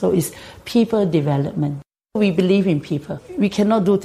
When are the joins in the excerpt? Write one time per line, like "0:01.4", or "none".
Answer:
0:02.2
0:03.2